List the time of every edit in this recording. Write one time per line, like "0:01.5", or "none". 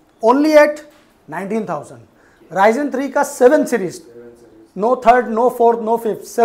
none